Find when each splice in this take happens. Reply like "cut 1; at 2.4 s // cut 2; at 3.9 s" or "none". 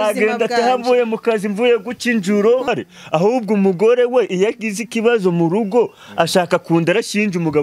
cut 1; at 2.7 s